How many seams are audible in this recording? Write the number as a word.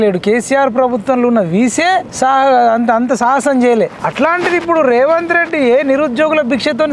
two